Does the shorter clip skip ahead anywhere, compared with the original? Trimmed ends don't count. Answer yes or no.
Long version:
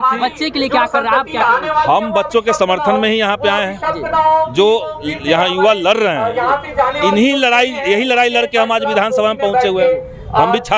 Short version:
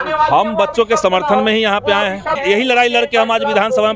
yes